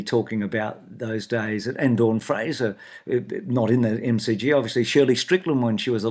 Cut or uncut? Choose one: uncut